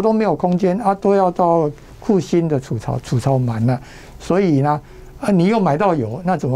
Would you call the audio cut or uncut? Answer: cut